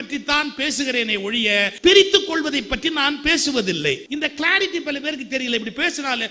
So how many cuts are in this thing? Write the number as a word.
two